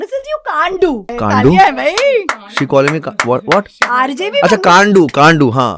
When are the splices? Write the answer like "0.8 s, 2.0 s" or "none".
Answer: 1.1 s